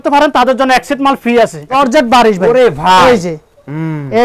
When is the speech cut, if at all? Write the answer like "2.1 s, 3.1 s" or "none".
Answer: 1.7 s